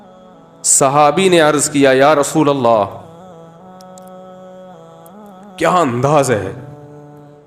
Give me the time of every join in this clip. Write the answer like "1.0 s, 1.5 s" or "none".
0.8 s, 3.1 s, 5.6 s, 6.6 s

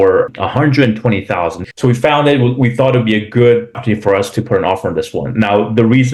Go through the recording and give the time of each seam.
1.6 s

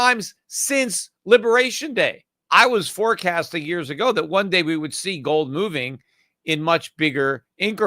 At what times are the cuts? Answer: 2.3 s

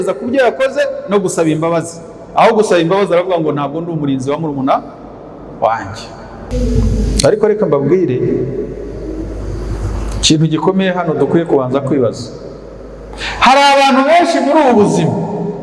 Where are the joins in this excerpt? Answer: 6.5 s

